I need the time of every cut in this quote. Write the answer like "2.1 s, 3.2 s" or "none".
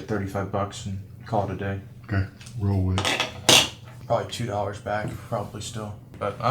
3.9 s